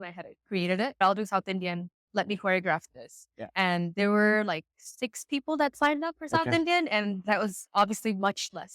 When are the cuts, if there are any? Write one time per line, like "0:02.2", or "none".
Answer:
0:01.0